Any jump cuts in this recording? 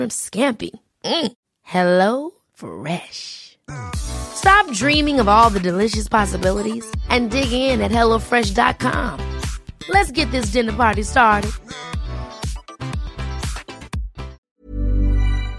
yes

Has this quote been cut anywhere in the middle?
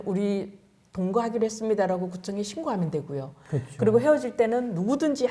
no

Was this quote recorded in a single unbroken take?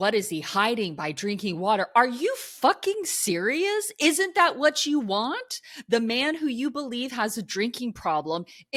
yes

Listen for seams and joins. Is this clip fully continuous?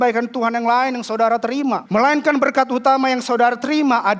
no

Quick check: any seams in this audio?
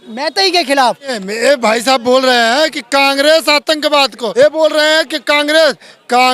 yes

